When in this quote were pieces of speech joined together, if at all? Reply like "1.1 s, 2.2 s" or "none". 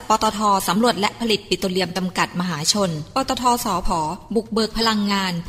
none